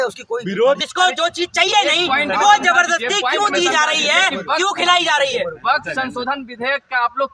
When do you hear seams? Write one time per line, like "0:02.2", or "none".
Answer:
none